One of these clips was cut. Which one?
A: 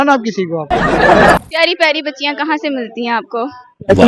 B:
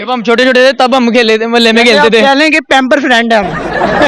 A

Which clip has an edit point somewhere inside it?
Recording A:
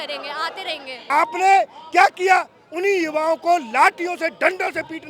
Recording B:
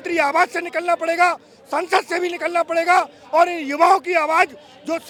A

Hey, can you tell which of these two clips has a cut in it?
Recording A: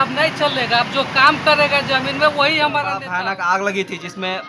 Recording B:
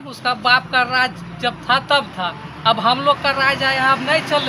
A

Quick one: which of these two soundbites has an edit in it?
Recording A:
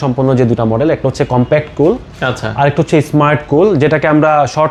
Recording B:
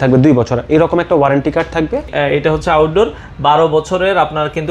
B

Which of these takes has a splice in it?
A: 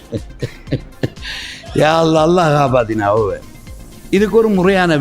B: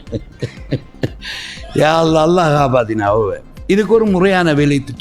B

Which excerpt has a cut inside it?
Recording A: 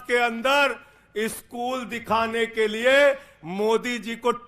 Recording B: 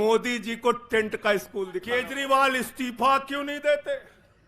B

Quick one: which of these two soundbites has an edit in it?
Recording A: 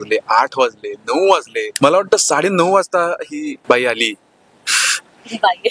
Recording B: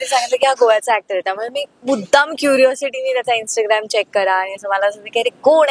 A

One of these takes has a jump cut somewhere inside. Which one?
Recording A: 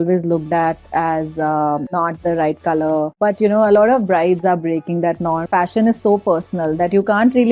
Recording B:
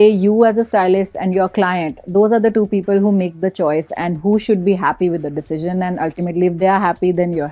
A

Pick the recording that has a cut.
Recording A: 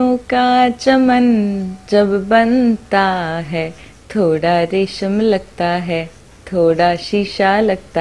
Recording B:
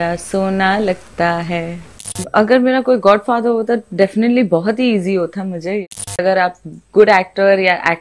B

